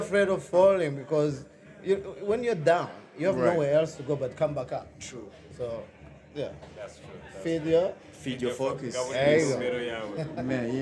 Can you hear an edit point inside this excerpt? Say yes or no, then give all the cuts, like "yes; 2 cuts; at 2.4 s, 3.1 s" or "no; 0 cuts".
no; 0 cuts